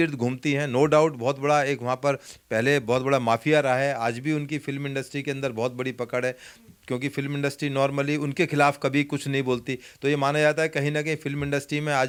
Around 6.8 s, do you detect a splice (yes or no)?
no